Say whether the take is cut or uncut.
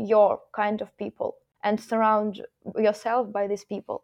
cut